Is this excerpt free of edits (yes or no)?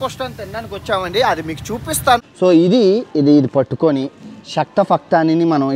no